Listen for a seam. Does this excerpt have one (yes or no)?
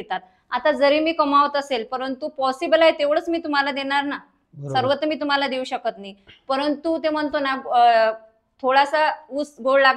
no